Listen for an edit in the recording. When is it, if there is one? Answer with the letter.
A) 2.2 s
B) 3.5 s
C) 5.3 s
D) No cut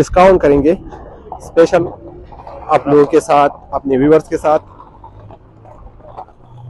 D